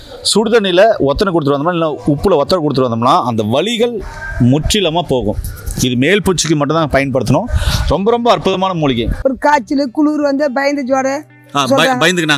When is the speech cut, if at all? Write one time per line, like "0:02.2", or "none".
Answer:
0:09.1